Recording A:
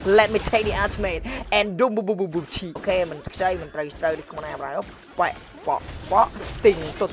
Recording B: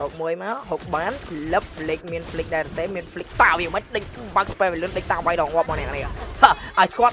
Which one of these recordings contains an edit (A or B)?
A